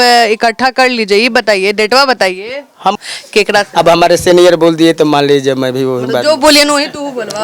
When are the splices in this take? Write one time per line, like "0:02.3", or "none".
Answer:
0:03.0